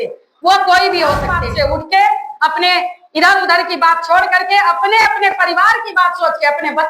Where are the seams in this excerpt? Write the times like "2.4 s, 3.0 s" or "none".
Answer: 1.4 s